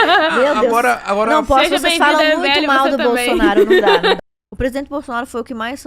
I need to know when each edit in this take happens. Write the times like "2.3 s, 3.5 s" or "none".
4.2 s